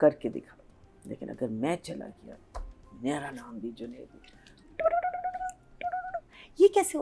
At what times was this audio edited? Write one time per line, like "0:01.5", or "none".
0:04.6